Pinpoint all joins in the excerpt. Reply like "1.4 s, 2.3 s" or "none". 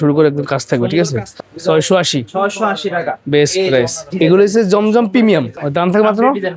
1.4 s, 4.1 s, 5.6 s